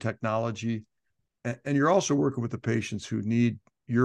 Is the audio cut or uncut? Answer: uncut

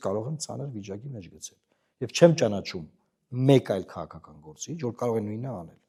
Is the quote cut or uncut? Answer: uncut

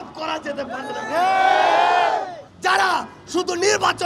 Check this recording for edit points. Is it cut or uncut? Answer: cut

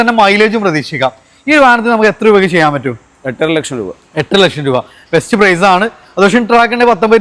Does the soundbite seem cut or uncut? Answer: uncut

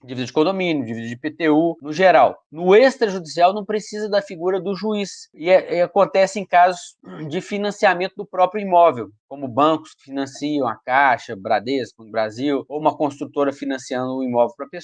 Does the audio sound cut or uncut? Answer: cut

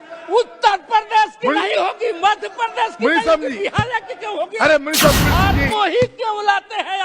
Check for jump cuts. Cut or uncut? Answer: cut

